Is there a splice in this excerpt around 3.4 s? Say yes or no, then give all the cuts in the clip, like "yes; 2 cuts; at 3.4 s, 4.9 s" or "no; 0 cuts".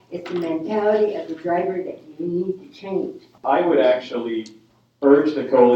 yes; 1 cut; at 3.4 s